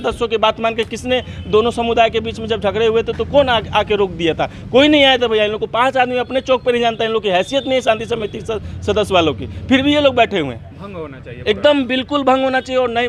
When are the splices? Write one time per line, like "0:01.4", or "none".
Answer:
none